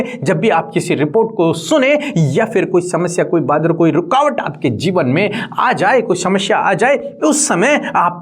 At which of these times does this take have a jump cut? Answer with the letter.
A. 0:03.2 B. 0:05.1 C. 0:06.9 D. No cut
D